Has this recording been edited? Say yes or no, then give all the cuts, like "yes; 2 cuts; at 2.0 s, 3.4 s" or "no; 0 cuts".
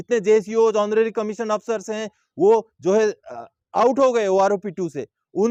no; 0 cuts